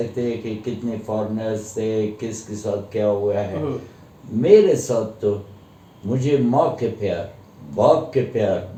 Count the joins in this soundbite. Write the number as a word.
zero